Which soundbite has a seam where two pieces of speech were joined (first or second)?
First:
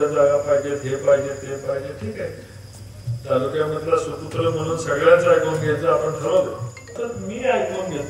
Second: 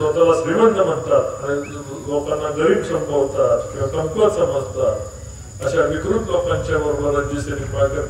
first